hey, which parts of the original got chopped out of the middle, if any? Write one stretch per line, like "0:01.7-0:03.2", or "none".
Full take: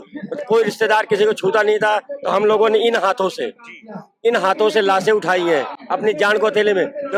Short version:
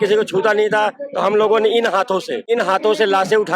0:03.4-0:04.1